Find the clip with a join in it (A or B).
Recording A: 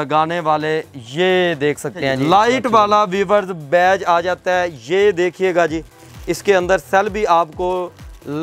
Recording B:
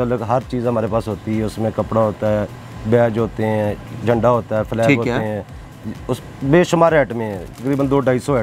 A